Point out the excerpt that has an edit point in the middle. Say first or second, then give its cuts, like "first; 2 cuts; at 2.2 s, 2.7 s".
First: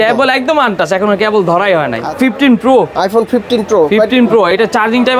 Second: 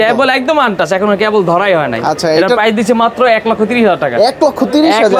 first; 1 cut; at 2.0 s